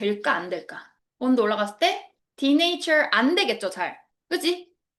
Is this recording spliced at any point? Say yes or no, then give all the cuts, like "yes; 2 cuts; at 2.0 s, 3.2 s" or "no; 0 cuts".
no; 0 cuts